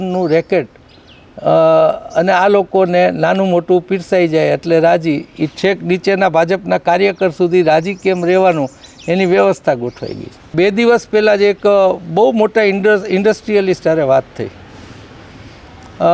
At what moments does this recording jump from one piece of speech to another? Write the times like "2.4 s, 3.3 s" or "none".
10.4 s